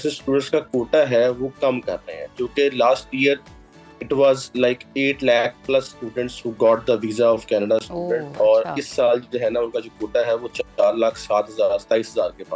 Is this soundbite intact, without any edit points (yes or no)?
yes